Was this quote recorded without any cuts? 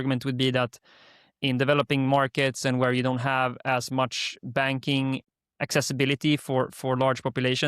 no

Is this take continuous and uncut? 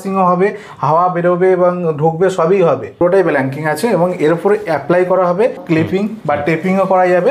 no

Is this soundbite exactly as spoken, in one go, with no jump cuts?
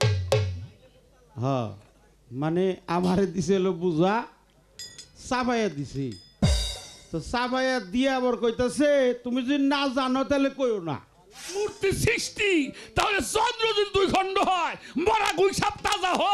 no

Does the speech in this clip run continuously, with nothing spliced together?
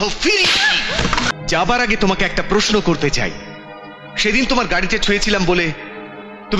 no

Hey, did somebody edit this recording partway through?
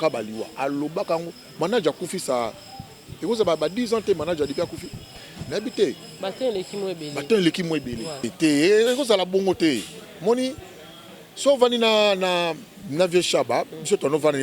yes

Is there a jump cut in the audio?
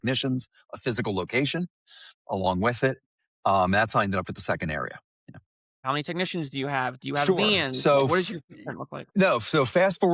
yes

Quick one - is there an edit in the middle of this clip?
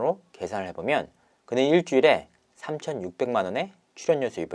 no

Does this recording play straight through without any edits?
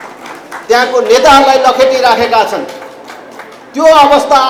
yes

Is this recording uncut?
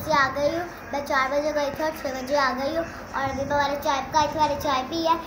yes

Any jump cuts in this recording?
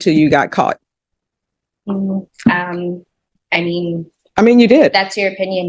no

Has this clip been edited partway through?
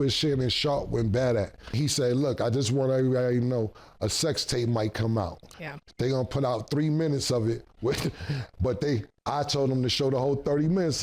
yes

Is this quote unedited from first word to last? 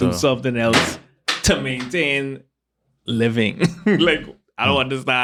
yes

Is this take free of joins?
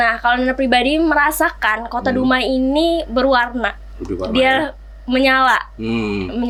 yes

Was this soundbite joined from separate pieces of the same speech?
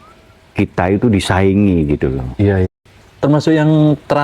yes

